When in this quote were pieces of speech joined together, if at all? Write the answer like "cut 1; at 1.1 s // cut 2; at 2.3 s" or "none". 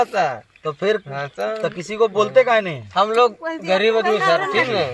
cut 1; at 2.8 s